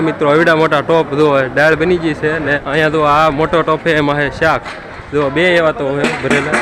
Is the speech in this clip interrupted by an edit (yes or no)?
yes